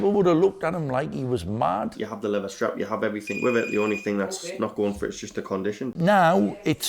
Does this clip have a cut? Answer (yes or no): yes